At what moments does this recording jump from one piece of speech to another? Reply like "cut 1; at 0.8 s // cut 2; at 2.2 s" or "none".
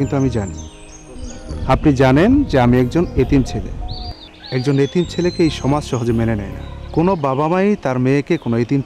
none